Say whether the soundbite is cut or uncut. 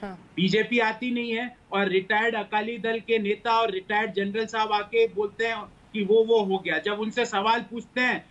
uncut